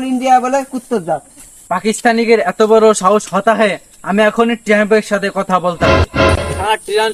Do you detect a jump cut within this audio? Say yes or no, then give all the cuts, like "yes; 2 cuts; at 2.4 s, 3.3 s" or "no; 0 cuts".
no; 0 cuts